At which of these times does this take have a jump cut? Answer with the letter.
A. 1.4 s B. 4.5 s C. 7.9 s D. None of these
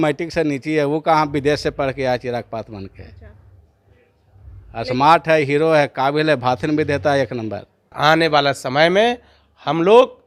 C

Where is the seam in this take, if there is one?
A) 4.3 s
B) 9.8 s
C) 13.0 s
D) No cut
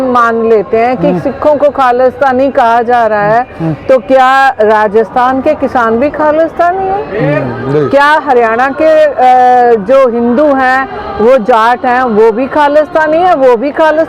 D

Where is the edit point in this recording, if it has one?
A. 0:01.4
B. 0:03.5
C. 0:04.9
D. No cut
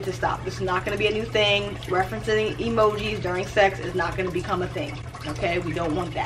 D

